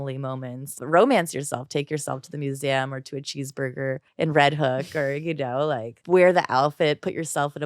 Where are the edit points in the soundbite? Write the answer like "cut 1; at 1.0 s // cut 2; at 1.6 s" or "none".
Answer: cut 1; at 0.8 s // cut 2; at 4.1 s // cut 3; at 5.9 s